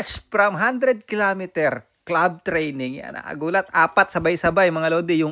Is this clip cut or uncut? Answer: uncut